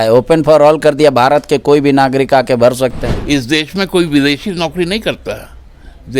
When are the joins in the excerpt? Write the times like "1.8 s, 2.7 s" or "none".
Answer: 3.1 s